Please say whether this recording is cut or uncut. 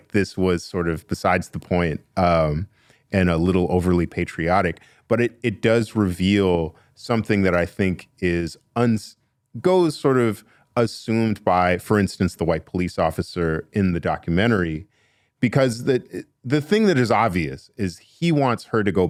uncut